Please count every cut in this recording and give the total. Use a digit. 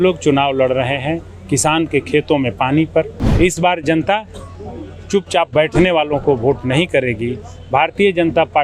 1